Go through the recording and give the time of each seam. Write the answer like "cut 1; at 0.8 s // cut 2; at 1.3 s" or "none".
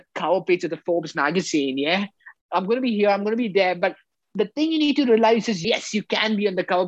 cut 1; at 2.3 s // cut 2; at 5.6 s